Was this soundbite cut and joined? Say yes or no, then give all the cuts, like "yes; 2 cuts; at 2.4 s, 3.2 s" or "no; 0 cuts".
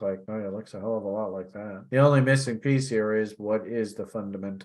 no; 0 cuts